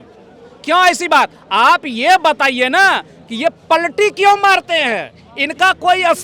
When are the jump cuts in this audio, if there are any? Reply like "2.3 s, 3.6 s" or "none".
none

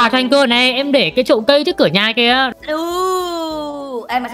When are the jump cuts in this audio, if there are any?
2.5 s

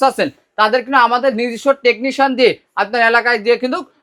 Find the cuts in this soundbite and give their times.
none

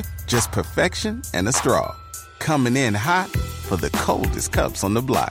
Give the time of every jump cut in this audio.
none

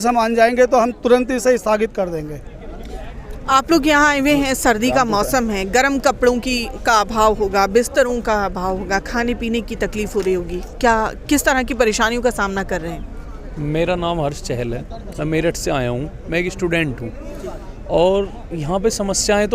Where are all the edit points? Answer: none

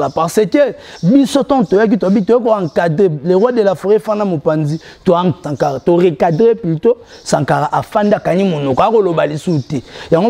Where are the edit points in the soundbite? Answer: 5.4 s

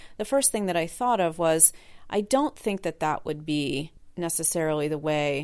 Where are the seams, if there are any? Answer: 4.0 s

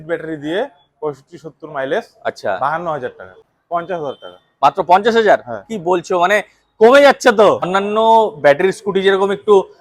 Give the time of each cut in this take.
3.5 s, 7.6 s

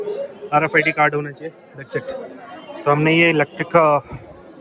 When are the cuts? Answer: none

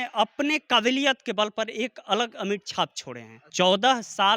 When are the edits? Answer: 3.4 s

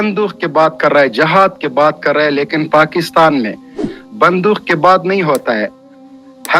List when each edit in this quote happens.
none

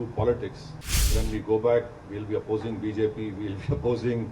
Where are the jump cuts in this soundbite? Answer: 1.1 s

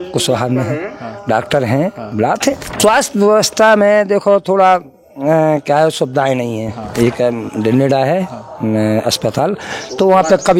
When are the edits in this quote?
2.8 s

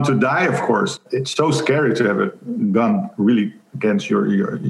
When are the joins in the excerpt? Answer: 1.0 s

